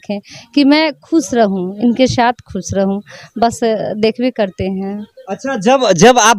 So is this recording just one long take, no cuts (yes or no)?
yes